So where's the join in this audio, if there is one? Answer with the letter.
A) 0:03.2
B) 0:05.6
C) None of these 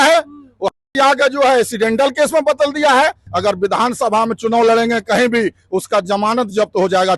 A